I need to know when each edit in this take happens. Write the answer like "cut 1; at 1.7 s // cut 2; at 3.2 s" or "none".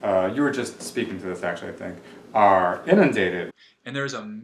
cut 1; at 3.5 s

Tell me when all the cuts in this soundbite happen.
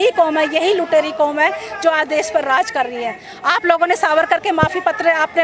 none

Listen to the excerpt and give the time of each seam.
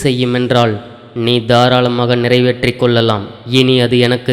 cut 1; at 3.3 s

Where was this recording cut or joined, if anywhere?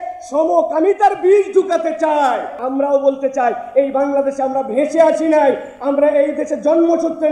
cut 1; at 2.6 s

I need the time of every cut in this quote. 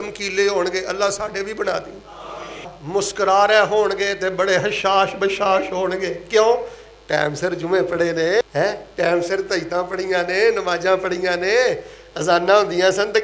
cut 1; at 2.7 s // cut 2; at 8.4 s

